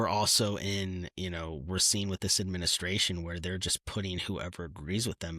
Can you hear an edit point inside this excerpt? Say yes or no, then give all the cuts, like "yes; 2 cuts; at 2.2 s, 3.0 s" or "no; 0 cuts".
no; 0 cuts